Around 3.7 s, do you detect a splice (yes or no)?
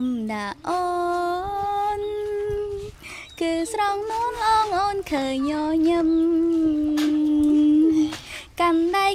no